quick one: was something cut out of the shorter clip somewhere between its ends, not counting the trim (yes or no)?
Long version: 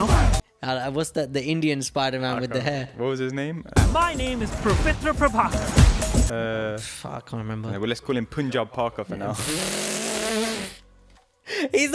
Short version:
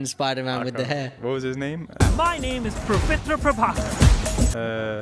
no